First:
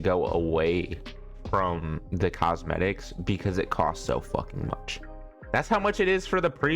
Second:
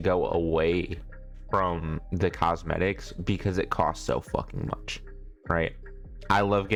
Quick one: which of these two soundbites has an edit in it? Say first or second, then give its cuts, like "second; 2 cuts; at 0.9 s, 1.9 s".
first; 1 cut; at 5.3 s